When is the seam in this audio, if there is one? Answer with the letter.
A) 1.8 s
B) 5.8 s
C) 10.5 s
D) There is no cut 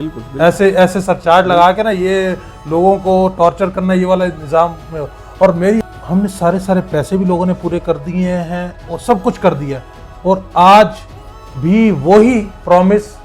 B